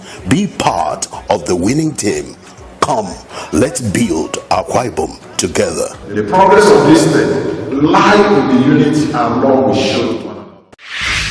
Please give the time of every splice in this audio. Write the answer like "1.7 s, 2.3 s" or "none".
10.2 s

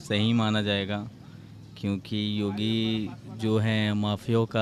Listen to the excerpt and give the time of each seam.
none

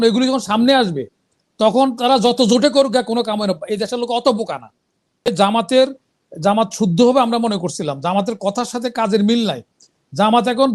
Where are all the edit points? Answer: 5.3 s

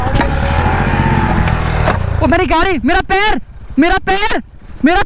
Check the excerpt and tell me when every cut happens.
none

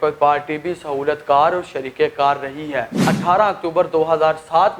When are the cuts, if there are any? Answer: 3.1 s

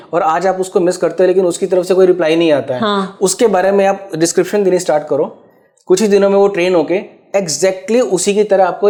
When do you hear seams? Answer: none

